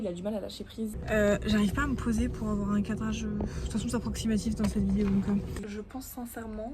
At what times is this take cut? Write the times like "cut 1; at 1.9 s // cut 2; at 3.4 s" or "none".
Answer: cut 1; at 1.0 s // cut 2; at 5.6 s